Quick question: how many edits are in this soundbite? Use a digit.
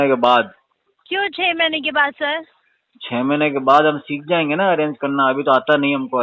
0